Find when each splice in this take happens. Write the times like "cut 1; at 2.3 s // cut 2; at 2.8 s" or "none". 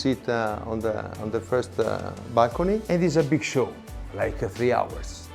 none